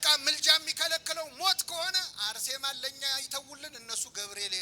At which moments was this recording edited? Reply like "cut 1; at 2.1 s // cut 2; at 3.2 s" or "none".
none